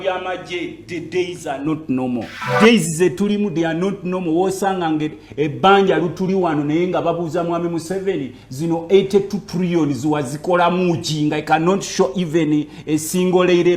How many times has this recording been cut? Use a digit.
1